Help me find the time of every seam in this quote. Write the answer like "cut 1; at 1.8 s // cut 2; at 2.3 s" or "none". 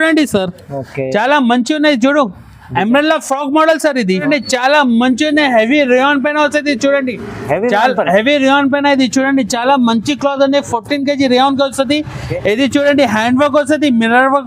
cut 1; at 4.1 s